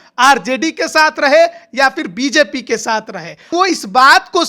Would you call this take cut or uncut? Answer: cut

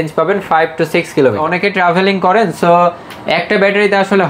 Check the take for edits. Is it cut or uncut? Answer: cut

